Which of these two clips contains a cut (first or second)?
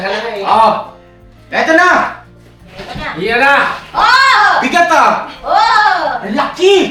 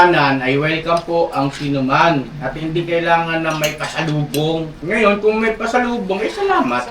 second